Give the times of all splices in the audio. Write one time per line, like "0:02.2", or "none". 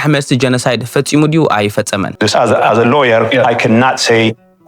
0:02.1